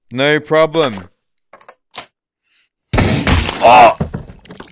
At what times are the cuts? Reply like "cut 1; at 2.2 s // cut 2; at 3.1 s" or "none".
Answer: none

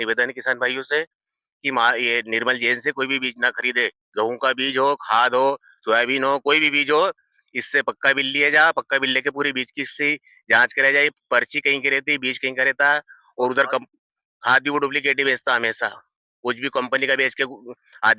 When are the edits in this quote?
none

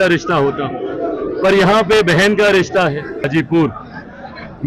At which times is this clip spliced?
cut 1; at 3.3 s

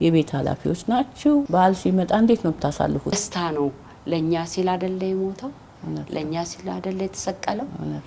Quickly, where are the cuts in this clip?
cut 1; at 1.5 s // cut 2; at 3.1 s

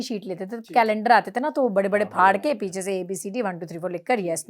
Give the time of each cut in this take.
none

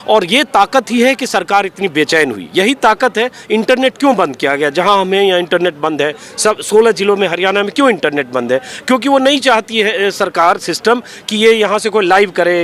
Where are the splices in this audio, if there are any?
none

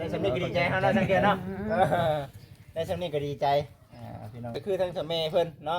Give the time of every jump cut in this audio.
cut 1; at 4.6 s

